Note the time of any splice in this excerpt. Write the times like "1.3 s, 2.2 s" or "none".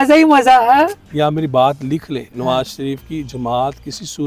1.0 s

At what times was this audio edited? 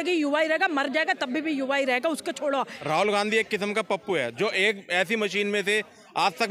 2.8 s

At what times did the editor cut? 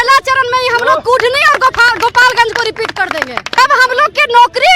3.6 s

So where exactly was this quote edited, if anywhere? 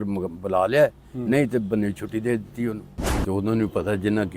3.2 s

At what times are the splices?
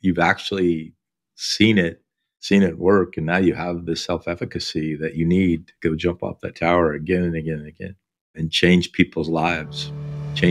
none

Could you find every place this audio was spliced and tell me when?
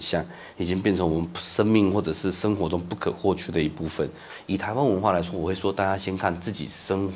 4.3 s

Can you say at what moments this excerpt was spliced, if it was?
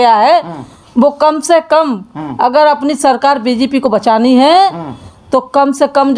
none

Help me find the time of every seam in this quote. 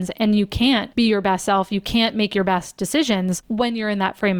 0.9 s, 3.4 s

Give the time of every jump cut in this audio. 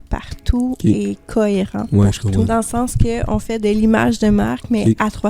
2.5 s

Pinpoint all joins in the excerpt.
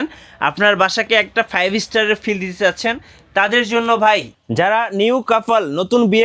4.4 s

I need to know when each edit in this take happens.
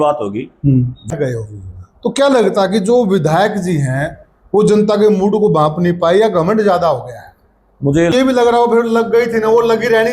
1.1 s, 8.1 s

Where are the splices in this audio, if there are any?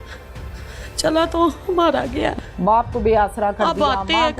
2.3 s

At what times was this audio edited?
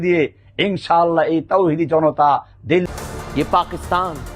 2.8 s

